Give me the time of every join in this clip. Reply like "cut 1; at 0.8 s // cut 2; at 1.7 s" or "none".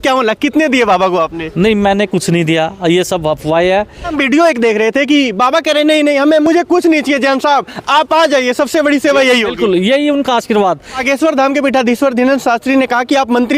cut 1; at 4.1 s // cut 2; at 11.0 s